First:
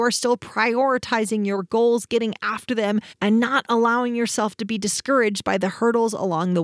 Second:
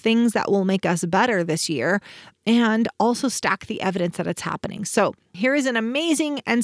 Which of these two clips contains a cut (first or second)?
second